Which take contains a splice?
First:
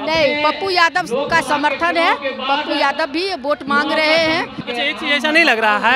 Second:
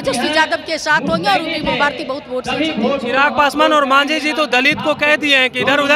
first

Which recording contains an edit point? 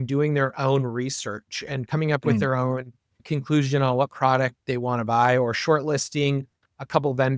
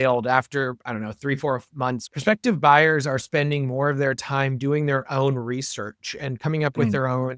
second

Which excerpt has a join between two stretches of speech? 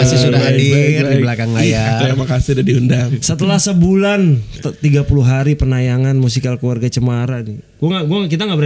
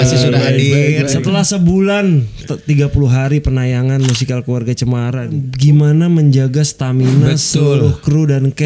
second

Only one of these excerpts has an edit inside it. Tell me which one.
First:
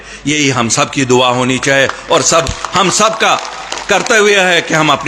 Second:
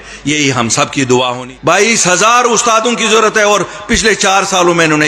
second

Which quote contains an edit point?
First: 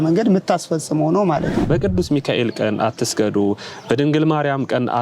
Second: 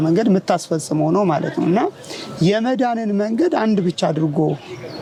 first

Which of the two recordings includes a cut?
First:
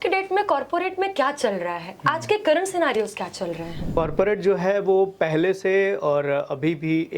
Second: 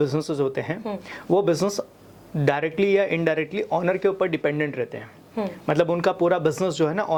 first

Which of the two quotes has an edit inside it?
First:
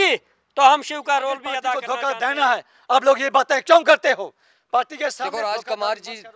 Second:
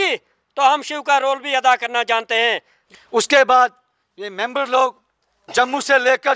first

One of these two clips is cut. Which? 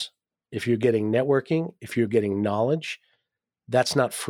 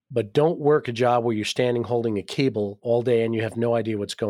second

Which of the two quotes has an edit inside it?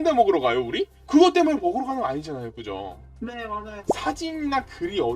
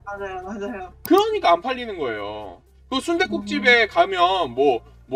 first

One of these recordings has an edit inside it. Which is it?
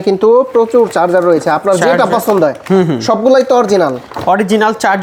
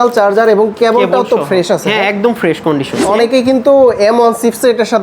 second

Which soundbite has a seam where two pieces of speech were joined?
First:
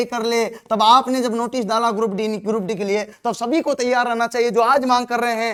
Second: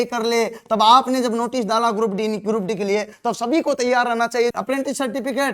second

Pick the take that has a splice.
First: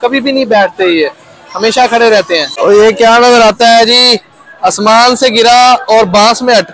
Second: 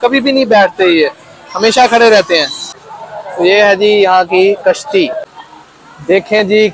first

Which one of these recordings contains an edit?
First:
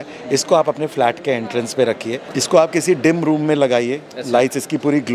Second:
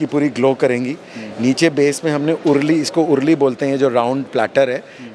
first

